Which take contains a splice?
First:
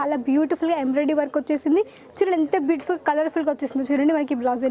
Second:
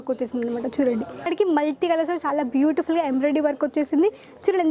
second; 1 cut; at 1.3 s

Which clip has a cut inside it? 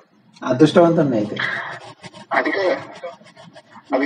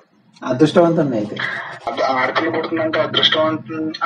second; 1 cut; at 1.9 s

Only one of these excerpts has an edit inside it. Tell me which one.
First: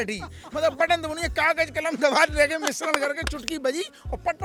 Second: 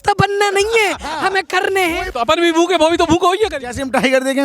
second; 1 cut; at 2.0 s

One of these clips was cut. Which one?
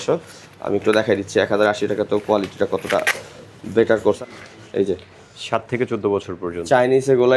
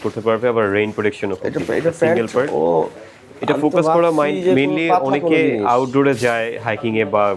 first; 1 cut; at 4.0 s

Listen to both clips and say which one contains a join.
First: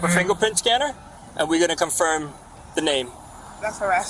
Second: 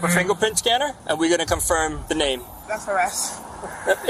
second; 2 cuts; at 1.0 s, 2.3 s

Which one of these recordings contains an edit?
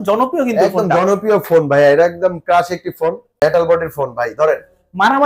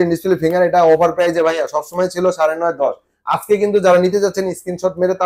first; 1 cut; at 3.4 s

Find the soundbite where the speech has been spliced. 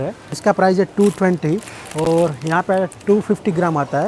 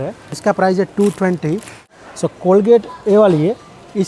second; 1 cut; at 1.9 s

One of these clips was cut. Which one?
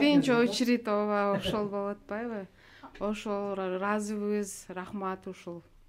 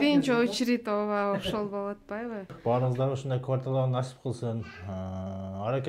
second; 1 cut; at 2.6 s

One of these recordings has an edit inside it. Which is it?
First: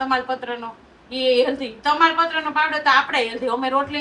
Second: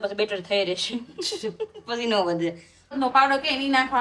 second; 1 cut; at 2.9 s

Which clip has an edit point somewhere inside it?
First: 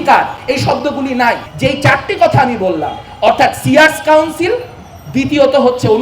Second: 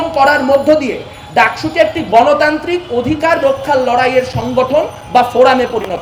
first; 1 cut; at 1.5 s

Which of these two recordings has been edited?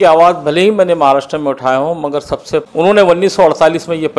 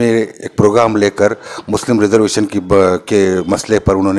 first; 1 cut; at 2.6 s

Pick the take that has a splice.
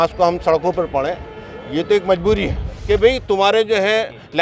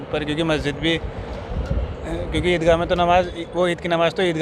first; 1 cut; at 2.7 s

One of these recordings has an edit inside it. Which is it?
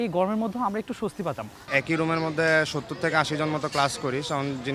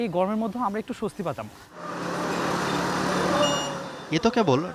first; 1 cut; at 1.7 s

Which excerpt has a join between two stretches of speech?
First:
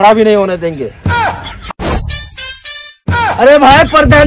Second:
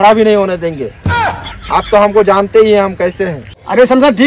first; 1 cut; at 1.6 s

